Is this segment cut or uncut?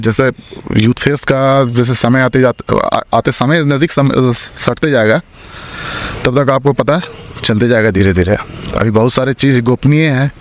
uncut